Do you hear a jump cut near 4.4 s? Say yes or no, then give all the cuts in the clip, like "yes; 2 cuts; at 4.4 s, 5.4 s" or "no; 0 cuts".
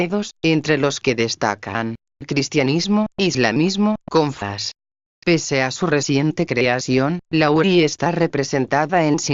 no; 0 cuts